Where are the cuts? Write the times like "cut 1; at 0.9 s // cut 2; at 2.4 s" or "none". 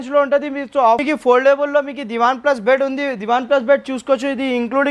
cut 1; at 1.0 s